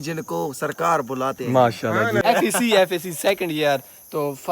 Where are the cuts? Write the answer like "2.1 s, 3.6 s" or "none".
2.2 s